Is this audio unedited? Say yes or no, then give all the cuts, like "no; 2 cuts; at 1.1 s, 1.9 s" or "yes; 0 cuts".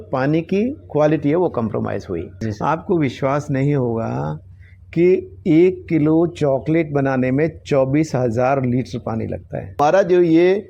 no; 2 cuts; at 2.4 s, 9.8 s